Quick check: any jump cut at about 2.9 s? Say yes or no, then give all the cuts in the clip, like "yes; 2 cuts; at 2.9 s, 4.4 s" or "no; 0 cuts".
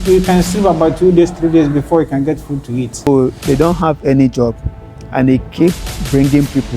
yes; 1 cut; at 2.9 s